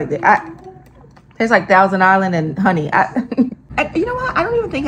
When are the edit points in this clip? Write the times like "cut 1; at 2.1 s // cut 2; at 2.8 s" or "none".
cut 1; at 3.6 s